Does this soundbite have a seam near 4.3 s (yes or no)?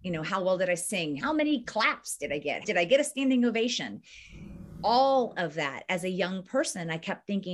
no